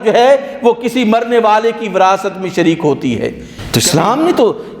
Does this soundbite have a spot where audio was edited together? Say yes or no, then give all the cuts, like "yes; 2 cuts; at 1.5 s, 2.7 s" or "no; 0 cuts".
yes; 1 cut; at 3.5 s